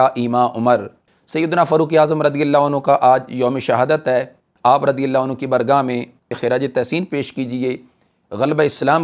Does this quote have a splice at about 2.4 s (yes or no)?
no